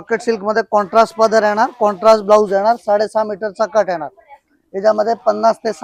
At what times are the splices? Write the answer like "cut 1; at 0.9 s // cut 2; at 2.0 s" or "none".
none